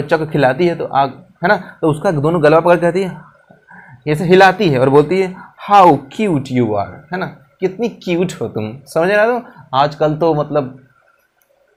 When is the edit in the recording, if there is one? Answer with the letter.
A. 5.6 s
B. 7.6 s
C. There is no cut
C